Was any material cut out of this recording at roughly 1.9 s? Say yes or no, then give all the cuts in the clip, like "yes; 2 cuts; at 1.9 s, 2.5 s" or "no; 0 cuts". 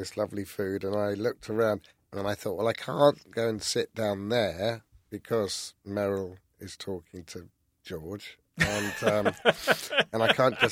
yes; 1 cut; at 1.9 s